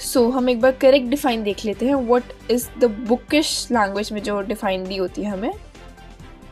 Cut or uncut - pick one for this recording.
cut